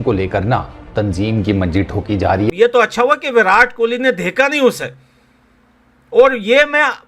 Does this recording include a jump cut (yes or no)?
yes